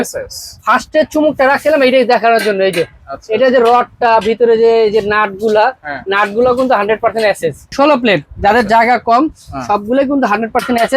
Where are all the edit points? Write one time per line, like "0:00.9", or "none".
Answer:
0:07.6